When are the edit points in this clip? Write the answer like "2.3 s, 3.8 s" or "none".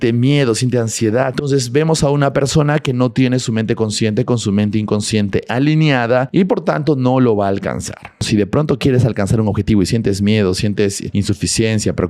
1.3 s, 6.3 s, 8.3 s, 11.0 s